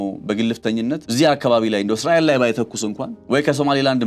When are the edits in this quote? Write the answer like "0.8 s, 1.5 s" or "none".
1.0 s, 3.1 s